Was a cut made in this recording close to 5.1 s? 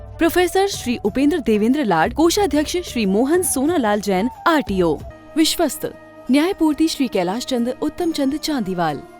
yes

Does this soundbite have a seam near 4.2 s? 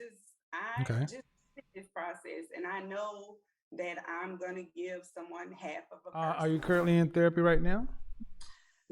no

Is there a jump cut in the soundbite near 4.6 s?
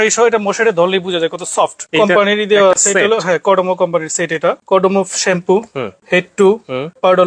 yes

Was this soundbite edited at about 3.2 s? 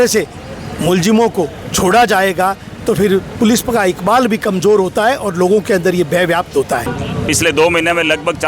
no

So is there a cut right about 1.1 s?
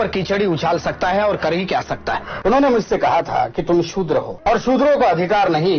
no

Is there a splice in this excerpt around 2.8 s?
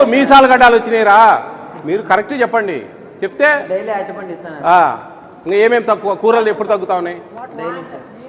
no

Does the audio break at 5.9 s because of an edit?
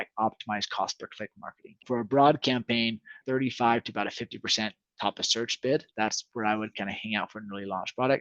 yes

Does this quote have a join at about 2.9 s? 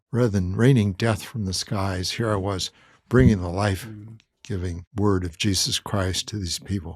no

